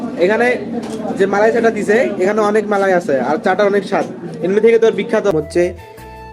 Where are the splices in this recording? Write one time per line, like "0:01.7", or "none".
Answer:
0:05.3